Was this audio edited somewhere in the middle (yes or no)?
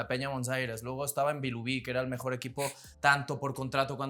yes